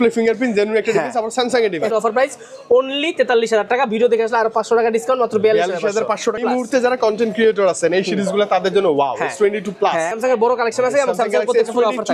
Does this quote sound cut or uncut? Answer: cut